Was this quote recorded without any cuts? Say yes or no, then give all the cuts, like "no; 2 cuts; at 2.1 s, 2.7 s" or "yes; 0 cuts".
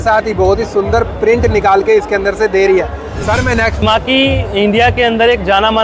no; 1 cut; at 3.8 s